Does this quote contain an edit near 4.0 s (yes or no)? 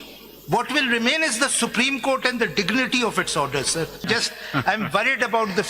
yes